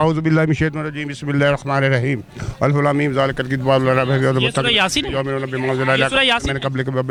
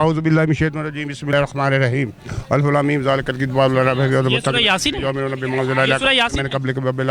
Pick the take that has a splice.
second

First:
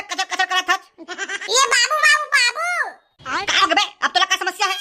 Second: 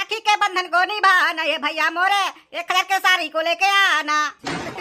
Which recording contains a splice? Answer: first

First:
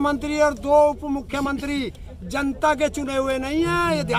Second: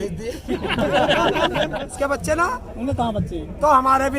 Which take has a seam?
second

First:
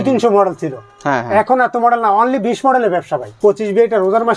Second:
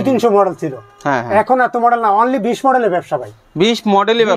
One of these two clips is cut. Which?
first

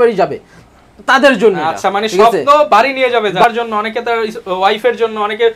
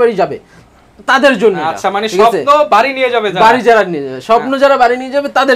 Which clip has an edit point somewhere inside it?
first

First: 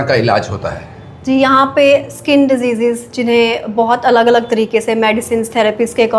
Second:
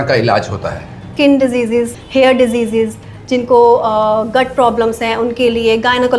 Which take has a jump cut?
second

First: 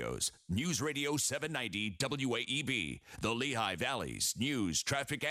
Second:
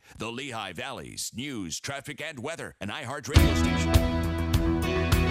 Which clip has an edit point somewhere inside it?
second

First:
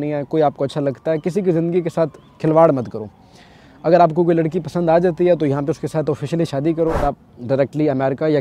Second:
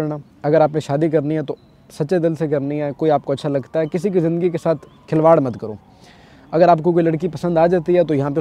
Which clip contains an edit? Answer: first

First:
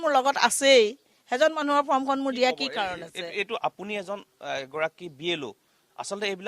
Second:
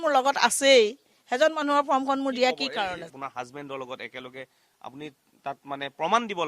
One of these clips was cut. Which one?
second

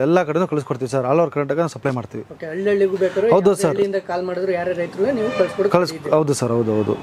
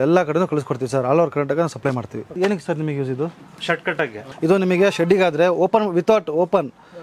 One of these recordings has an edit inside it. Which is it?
second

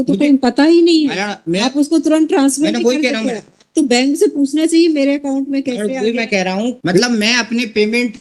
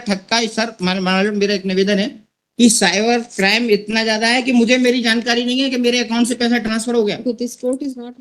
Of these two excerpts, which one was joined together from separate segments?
first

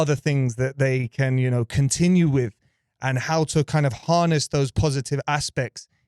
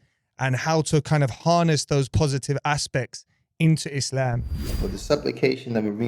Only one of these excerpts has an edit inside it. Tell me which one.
second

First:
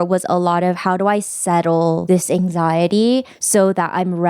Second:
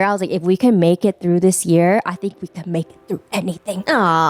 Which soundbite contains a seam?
first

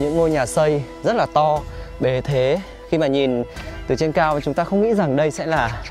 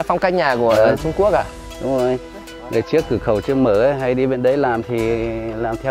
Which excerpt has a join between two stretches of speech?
second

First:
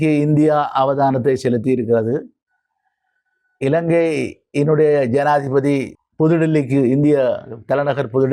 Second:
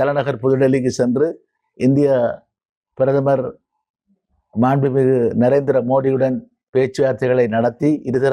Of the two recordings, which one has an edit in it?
first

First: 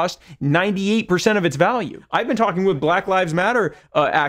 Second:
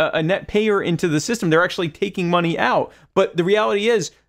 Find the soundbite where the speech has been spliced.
first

